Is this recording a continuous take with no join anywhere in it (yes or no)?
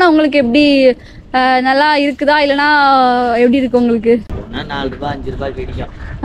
no